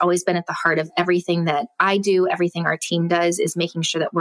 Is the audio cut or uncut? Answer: uncut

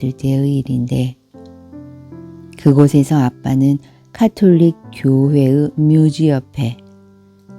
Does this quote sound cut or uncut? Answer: cut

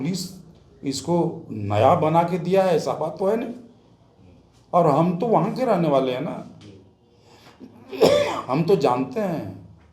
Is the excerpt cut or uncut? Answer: uncut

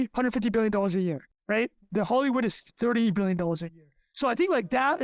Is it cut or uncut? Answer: uncut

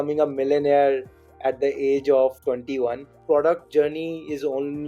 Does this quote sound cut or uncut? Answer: cut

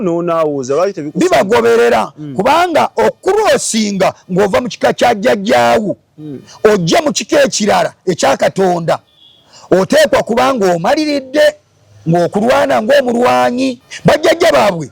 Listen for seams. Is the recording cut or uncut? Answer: cut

